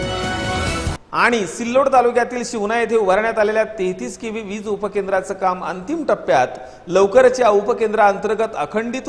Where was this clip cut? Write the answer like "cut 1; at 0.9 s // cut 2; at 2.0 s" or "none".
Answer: cut 1; at 0.9 s